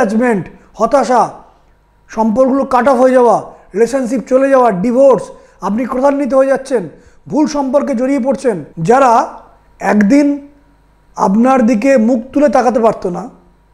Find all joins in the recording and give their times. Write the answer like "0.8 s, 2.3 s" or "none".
8.6 s